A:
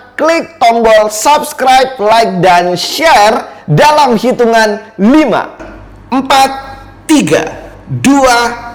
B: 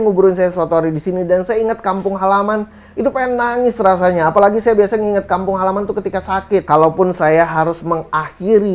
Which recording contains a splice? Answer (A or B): B